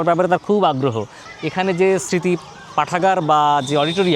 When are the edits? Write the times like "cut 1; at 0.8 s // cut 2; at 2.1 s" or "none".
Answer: cut 1; at 1.2 s

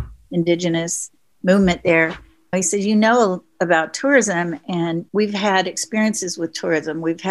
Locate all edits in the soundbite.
cut 1; at 5.1 s

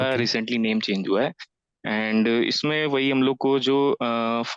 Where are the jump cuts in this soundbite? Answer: none

